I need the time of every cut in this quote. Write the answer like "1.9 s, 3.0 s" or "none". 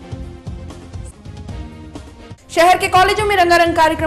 1.4 s